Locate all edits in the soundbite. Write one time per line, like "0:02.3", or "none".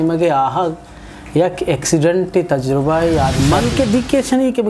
0:03.4